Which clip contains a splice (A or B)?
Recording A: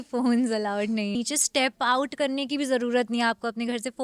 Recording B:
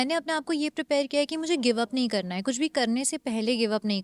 A